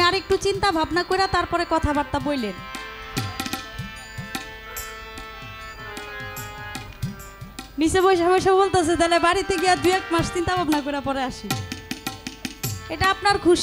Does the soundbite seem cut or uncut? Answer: uncut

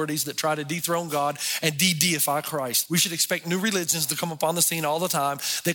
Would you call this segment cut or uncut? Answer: cut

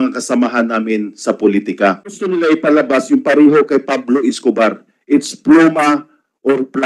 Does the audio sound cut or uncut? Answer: cut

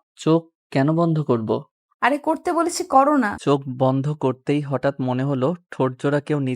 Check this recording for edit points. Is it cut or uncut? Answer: cut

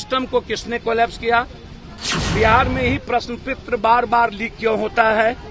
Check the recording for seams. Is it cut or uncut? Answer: uncut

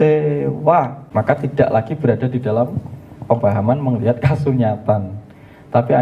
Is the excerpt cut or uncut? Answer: cut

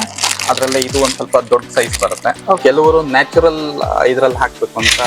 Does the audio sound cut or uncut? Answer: cut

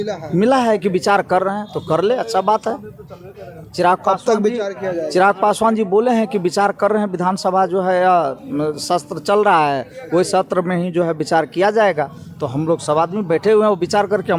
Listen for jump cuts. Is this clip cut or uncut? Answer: uncut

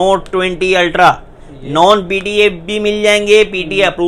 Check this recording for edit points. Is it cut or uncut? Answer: uncut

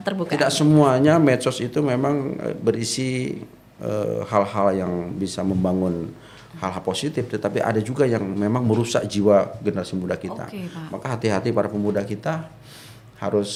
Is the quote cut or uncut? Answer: uncut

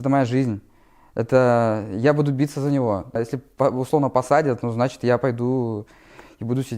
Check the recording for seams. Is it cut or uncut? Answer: cut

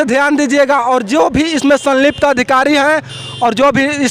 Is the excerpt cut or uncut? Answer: uncut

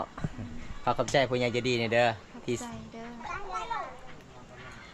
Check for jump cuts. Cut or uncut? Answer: uncut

